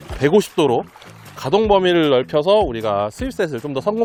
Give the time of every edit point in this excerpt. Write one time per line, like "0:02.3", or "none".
none